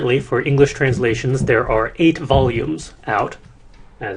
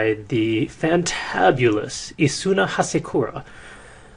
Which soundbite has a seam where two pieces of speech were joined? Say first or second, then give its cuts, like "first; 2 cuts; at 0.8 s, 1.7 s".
second; 1 cut; at 2.0 s